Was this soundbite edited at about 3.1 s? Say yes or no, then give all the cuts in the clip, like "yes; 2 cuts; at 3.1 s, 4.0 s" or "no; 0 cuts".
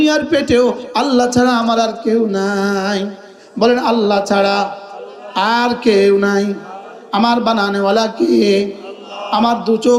no; 0 cuts